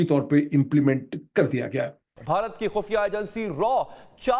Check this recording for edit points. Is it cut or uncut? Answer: cut